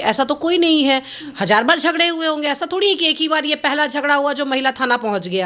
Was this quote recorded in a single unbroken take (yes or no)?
yes